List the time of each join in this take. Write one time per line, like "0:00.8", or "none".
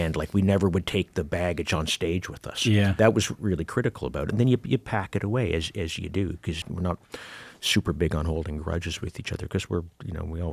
0:03.0
0:06.6

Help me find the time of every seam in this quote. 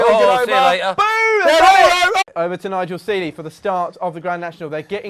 none

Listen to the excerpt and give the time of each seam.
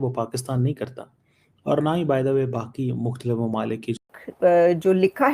0:04.0

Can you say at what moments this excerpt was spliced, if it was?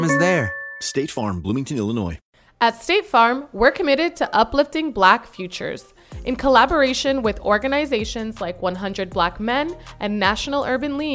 0:02.2

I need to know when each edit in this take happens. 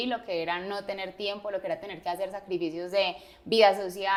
none

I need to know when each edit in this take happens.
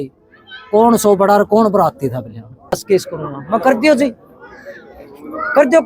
0:02.8

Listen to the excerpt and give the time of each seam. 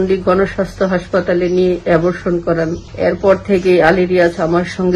0:02.8

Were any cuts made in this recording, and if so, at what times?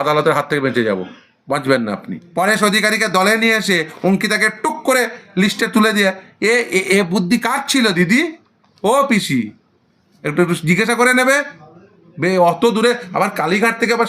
0:02.1

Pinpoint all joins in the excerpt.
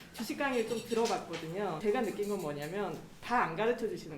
0:01.8

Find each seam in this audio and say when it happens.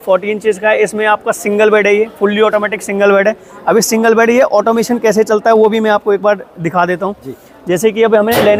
none

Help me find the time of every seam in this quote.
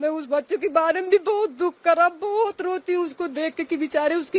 none

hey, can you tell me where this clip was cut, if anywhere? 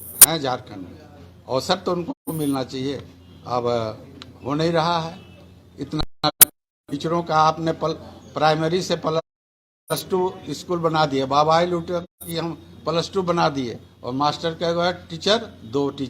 none

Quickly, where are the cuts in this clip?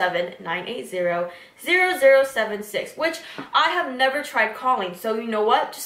none

